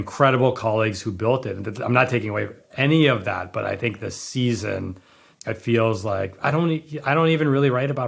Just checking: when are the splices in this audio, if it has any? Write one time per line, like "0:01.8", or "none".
0:05.3